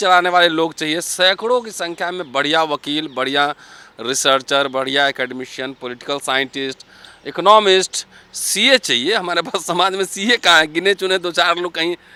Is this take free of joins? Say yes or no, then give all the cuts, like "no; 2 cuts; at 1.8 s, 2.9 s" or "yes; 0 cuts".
yes; 0 cuts